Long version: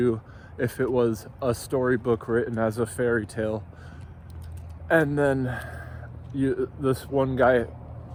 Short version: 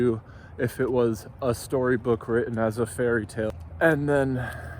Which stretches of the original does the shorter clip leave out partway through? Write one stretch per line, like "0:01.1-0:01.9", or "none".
0:03.5-0:04.6